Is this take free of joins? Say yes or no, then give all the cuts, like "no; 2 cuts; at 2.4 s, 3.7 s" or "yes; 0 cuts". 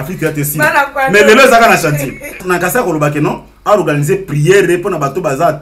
no; 1 cut; at 2.4 s